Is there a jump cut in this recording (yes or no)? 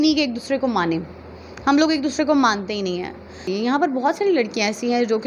yes